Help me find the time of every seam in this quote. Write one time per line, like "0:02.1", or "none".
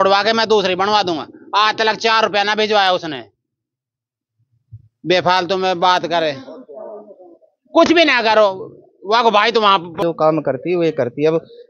0:10.0